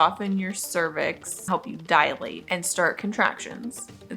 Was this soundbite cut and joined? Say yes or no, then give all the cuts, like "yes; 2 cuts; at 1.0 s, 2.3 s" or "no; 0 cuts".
yes; 2 cuts; at 1.5 s, 2.4 s